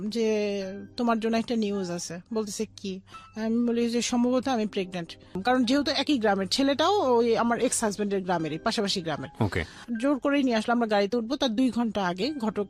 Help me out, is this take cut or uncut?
cut